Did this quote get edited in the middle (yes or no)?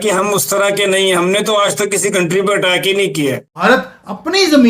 yes